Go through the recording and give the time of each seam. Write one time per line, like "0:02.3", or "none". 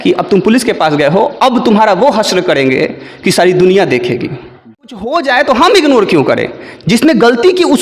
0:05.1

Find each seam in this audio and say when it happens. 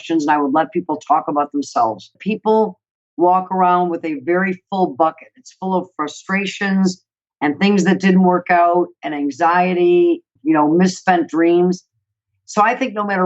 0:02.2
0:10.3

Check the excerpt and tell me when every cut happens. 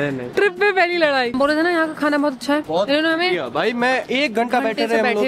0:01.3
0:02.7

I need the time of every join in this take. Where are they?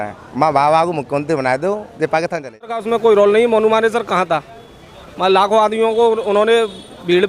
0:02.8

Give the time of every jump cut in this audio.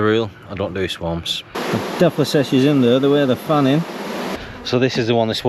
0:01.6
0:04.4

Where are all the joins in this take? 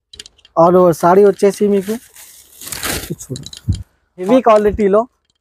0:04.3

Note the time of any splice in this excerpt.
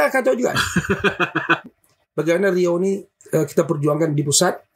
0:01.7

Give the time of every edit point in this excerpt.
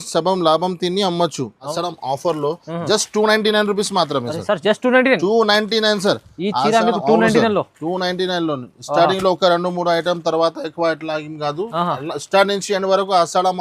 0:01.7

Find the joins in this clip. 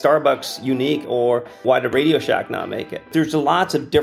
0:01.4
0:03.1

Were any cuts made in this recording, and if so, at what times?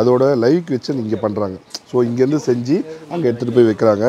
none

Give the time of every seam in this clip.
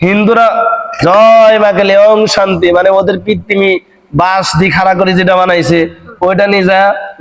none

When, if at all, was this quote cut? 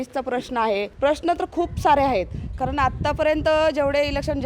0:00.9

